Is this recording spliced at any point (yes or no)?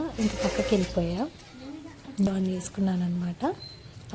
yes